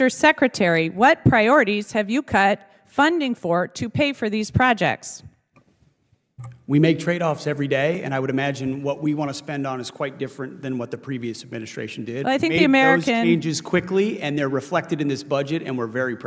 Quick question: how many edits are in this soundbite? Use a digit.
0